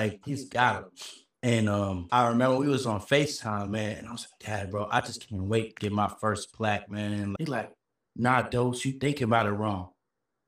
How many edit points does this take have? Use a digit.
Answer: 1